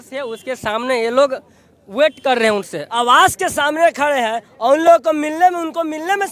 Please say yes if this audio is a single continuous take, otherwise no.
yes